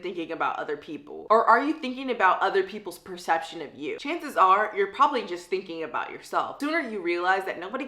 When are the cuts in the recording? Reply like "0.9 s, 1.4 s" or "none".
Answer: 6.5 s